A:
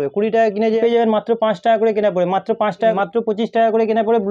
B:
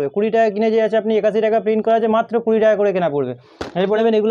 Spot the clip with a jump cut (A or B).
A